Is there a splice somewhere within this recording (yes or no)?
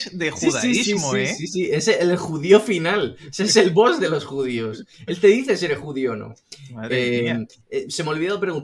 no